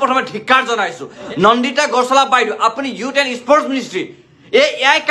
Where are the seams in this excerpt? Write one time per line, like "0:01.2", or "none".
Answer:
0:01.2